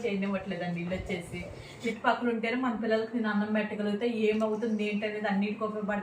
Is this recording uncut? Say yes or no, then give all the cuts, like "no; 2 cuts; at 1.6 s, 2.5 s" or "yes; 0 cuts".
no; 1 cut; at 1.8 s